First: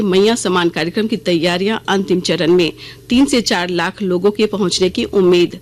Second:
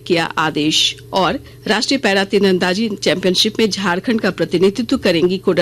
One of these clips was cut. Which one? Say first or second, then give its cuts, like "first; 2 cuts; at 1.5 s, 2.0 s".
second; 1 cut; at 1.5 s